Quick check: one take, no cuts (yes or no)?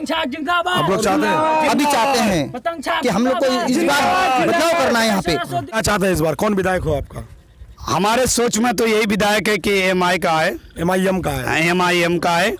no